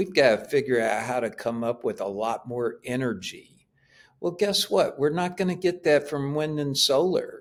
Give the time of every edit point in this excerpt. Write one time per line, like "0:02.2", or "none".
none